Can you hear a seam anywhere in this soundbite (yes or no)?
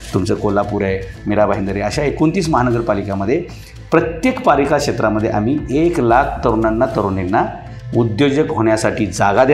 no